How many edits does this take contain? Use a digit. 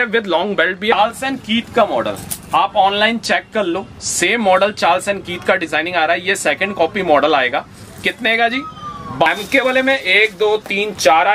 2